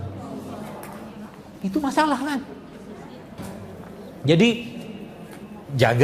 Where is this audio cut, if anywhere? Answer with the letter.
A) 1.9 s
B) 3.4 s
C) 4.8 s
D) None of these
B